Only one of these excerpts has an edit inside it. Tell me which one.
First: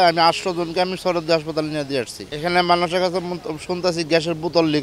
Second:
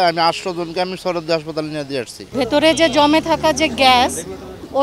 second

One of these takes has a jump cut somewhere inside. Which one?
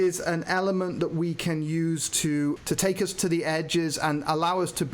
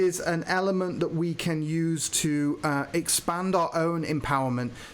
first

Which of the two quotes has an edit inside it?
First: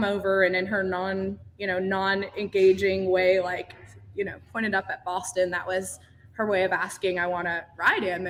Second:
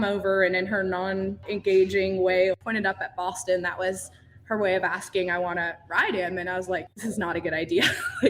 second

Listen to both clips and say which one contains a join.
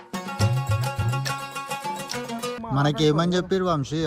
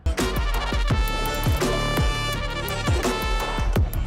first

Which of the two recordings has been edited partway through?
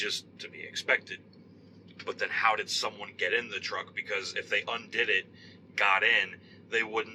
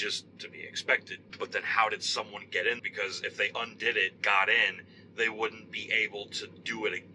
second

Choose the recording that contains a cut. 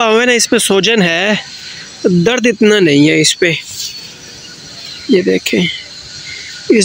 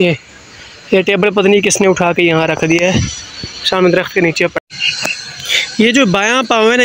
second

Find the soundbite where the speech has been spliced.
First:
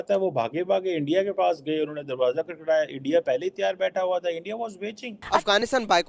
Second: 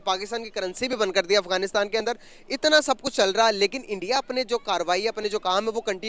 first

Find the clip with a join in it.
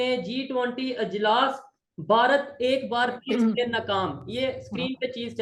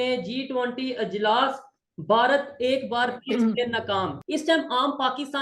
second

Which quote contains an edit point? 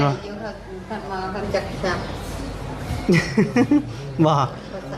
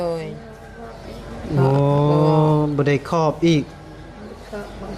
first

